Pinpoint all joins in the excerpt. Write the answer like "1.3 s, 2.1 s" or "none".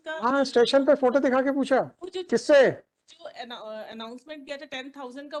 none